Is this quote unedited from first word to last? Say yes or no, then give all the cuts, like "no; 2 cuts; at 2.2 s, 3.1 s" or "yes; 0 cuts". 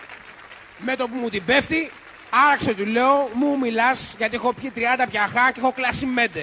no; 1 cut; at 4.4 s